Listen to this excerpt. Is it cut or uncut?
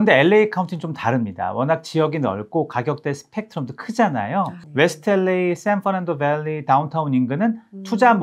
uncut